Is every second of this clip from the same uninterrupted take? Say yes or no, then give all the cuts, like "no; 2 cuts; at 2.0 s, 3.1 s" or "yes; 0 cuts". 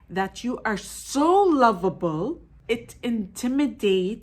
no; 1 cut; at 2.6 s